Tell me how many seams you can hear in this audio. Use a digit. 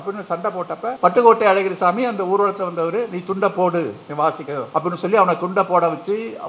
2